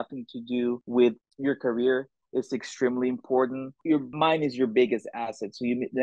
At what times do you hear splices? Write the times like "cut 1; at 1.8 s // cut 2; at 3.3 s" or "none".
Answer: cut 1; at 0.8 s // cut 2; at 3.9 s

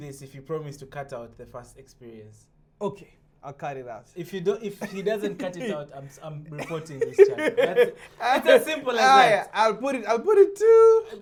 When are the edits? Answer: none

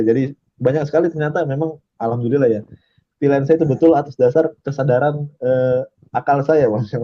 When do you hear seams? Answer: none

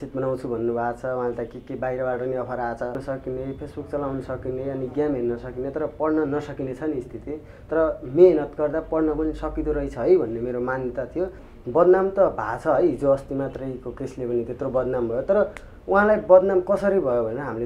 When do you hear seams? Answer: cut 1; at 3.0 s // cut 2; at 11.5 s

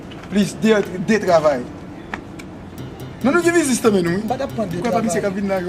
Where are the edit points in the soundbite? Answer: cut 1; at 4.3 s

